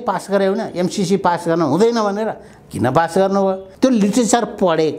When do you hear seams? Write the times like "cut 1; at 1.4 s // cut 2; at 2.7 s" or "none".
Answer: cut 1; at 3.7 s